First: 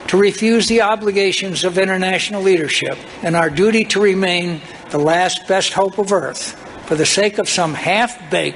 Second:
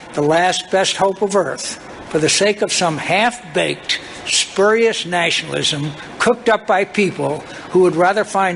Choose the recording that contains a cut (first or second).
first